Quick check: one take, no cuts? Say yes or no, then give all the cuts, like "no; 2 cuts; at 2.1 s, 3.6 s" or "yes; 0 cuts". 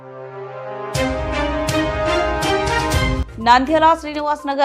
no; 1 cut; at 3.2 s